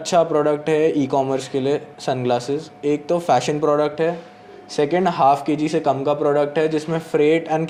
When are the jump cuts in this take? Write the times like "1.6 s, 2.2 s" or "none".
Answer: none